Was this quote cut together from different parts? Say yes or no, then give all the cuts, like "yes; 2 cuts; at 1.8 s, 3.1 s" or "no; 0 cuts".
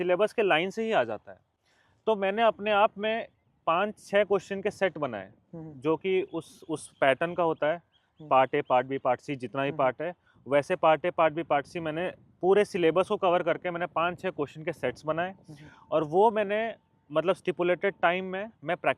no; 0 cuts